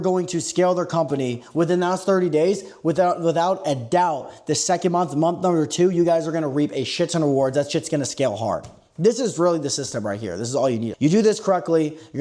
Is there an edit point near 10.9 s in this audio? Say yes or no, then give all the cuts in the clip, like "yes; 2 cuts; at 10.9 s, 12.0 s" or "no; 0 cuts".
yes; 1 cut; at 10.9 s